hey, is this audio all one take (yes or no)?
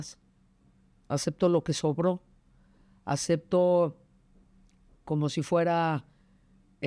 yes